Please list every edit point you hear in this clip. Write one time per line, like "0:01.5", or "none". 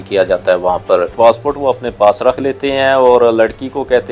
0:01.1